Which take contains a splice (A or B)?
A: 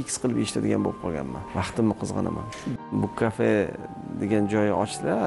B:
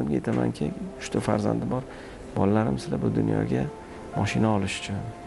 A